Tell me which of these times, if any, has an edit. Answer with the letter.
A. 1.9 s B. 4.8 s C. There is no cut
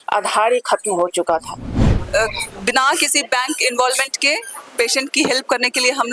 A